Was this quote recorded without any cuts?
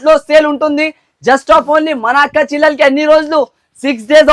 yes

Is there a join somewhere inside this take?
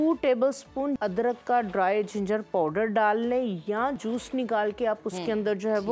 yes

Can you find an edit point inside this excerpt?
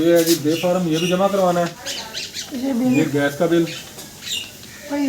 yes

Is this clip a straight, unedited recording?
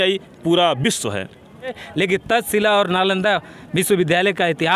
no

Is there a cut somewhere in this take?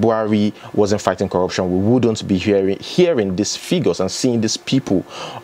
no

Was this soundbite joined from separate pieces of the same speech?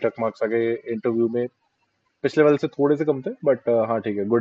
no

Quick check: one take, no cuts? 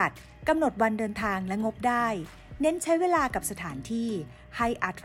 yes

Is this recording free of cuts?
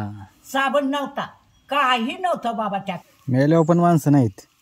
no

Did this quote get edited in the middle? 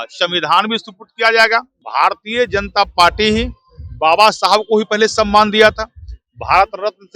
yes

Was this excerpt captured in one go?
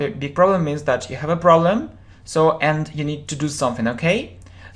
no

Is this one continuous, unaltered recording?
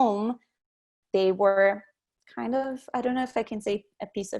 no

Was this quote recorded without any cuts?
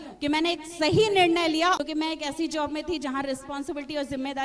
no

